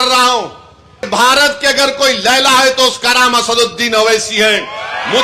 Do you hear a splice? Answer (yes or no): yes